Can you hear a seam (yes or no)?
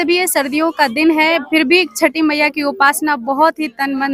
no